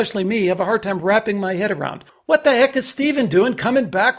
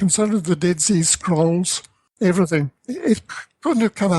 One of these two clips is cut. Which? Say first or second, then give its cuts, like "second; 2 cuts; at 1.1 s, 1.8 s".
second; 2 cuts; at 2.2 s, 2.7 s